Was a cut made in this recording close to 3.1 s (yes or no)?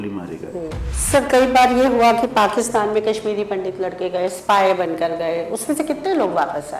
no